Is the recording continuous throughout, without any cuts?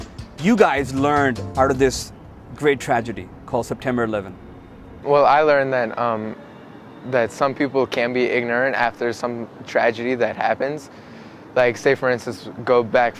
no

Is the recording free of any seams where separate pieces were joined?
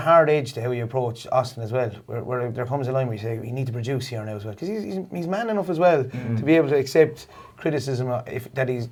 yes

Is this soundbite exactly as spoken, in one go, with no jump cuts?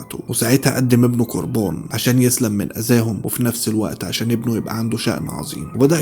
yes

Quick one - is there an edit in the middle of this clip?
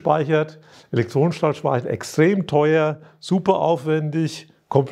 no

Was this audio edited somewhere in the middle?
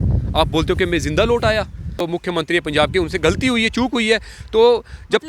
yes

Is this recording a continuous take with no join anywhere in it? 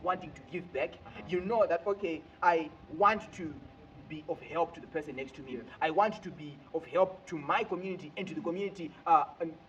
yes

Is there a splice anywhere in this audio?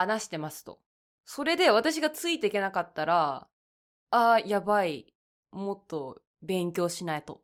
no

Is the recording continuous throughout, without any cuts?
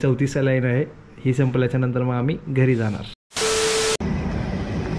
yes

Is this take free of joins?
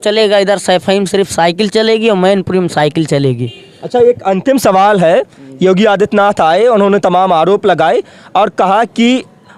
yes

